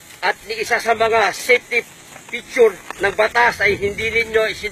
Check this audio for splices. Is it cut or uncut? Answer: uncut